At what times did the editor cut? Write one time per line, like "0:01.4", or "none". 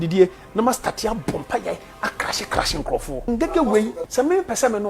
0:03.3
0:04.0